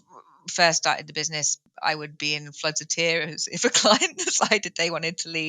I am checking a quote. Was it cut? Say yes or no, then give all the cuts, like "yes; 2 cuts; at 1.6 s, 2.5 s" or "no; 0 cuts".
yes; 1 cut; at 1.6 s